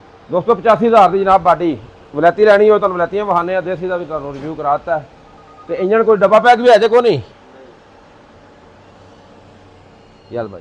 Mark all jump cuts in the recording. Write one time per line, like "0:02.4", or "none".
none